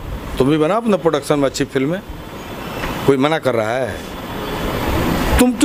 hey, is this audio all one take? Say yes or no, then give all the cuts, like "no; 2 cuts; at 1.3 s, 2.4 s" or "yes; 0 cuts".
yes; 0 cuts